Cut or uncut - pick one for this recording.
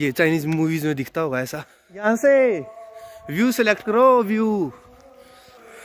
uncut